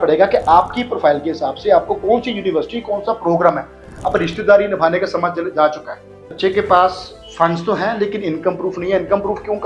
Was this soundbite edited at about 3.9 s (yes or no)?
no